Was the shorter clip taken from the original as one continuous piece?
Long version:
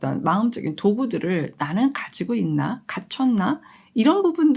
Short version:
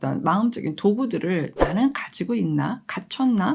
yes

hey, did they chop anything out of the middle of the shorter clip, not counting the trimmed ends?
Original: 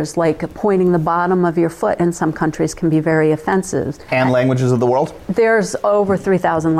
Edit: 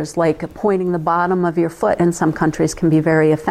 no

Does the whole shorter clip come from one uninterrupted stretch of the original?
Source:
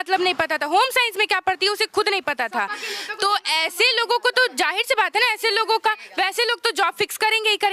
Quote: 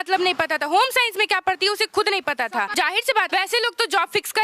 no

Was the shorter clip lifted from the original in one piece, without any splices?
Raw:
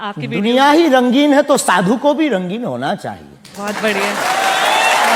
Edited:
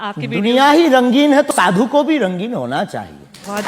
no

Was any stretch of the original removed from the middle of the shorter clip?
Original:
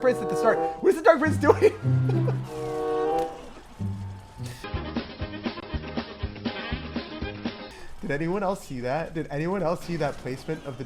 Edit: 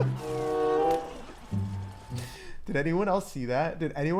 yes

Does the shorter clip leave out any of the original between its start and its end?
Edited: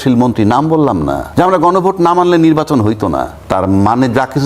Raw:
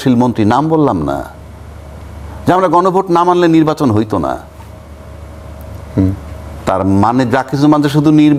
yes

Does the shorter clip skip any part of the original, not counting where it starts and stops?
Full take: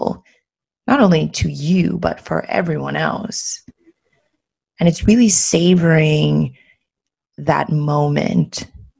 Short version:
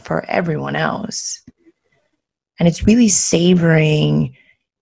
no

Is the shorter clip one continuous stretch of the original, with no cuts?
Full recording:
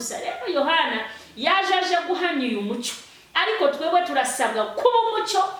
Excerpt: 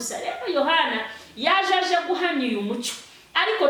yes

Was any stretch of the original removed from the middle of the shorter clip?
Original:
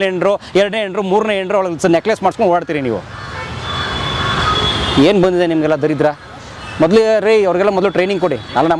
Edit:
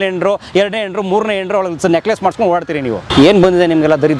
yes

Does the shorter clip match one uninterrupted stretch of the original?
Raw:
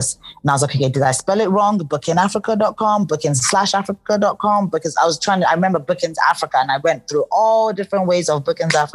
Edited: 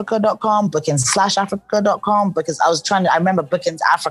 yes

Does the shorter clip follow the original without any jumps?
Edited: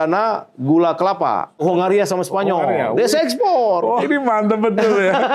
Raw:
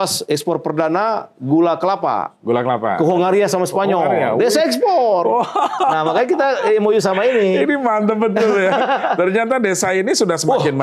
no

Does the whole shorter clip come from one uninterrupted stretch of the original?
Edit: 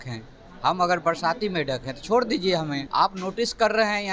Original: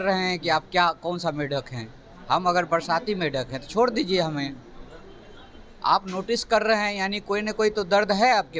no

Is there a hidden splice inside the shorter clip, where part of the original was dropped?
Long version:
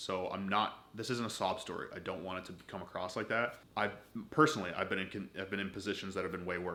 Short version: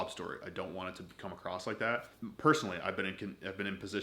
yes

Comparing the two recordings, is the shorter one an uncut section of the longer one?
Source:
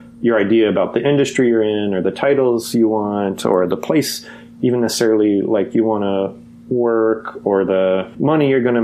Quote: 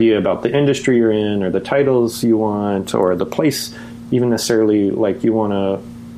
yes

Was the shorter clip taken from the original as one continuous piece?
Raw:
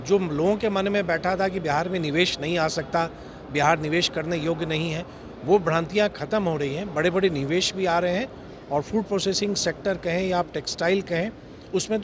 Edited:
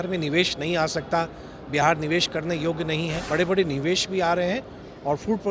no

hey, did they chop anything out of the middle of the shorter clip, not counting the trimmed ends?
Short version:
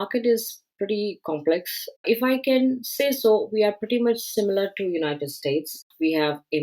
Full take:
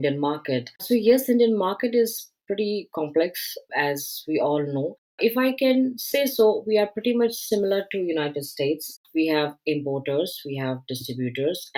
yes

